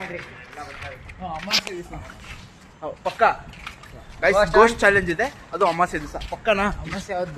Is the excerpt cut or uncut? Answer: uncut